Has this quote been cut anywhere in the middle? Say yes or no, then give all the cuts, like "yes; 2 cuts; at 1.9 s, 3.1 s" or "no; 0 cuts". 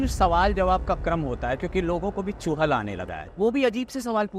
yes; 1 cut; at 3.2 s